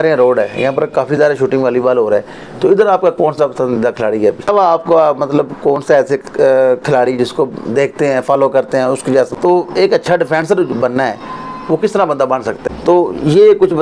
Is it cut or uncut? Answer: cut